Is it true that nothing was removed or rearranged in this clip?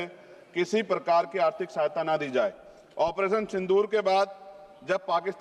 yes; 0 cuts

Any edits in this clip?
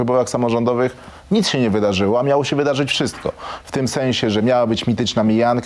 no; 0 cuts

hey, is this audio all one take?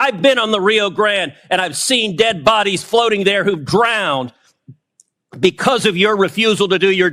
yes; 0 cuts

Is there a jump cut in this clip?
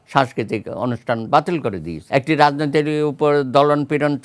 yes; 1 cut; at 2.0 s

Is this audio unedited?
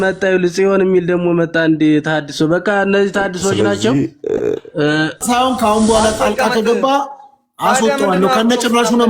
no; 1 cut; at 5.2 s

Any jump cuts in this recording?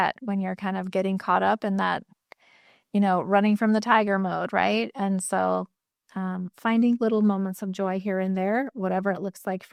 no; 0 cuts

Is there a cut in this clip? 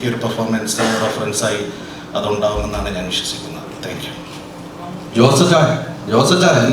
no; 0 cuts

